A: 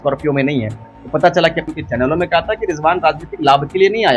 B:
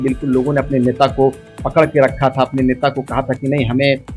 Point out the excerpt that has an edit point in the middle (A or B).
A